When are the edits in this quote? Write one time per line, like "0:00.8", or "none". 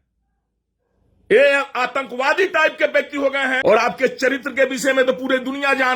0:03.6